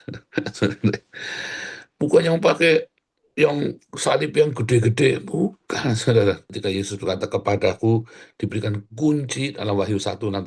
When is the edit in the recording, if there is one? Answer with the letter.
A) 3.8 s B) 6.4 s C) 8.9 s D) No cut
B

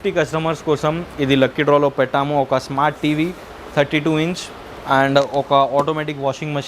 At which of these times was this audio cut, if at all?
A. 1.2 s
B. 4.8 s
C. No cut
B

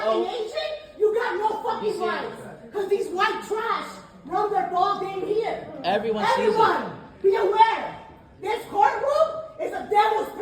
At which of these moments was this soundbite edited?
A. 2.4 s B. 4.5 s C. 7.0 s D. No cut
A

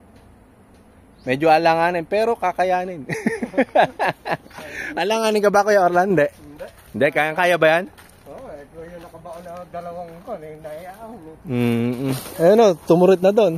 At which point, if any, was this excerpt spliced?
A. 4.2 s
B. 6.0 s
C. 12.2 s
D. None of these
C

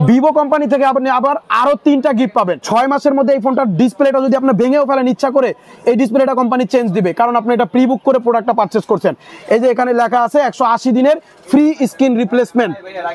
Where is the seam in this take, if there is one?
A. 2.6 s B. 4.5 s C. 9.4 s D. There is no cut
A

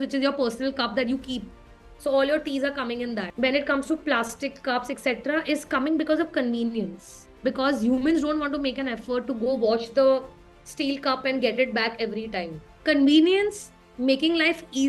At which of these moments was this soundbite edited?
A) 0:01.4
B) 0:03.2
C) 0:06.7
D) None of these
B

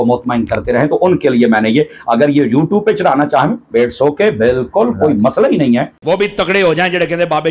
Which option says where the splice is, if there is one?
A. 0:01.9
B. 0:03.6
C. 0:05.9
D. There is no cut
C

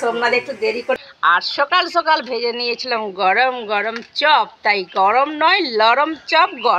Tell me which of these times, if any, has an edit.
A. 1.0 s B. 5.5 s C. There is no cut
A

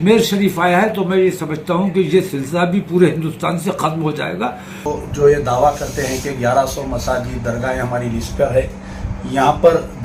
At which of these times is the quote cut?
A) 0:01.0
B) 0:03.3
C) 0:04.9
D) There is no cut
C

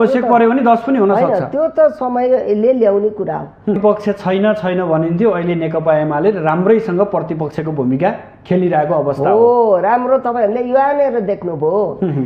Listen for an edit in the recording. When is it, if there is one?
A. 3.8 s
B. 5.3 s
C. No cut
A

